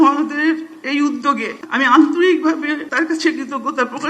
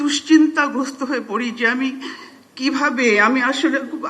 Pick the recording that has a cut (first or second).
first